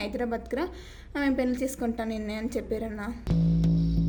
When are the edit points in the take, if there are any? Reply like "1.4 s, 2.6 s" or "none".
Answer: none